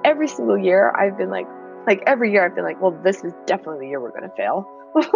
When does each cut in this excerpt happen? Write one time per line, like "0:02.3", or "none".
0:01.6

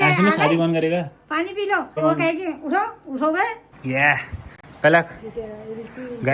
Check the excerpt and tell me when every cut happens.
0:02.0
0:03.7

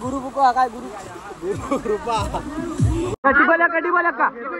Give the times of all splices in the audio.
0:03.1

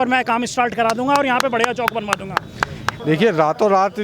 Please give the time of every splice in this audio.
0:02.8

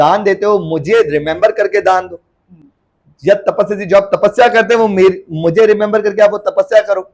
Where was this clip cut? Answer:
none

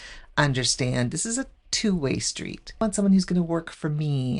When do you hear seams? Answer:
0:02.8

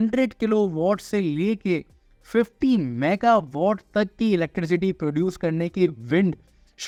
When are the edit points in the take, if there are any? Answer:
none

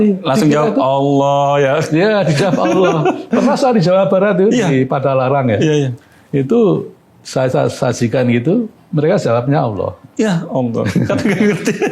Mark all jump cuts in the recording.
none

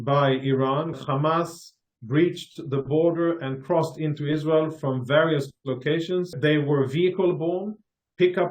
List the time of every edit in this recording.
0:00.9
0:06.3

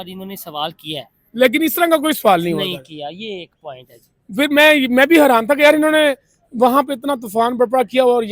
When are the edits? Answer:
none

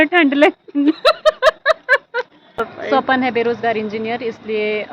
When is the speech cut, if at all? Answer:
0:02.6

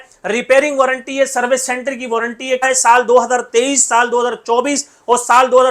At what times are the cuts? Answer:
0:02.6

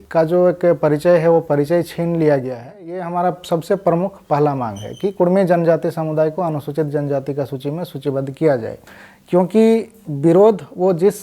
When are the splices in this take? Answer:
0:03.0
0:08.8

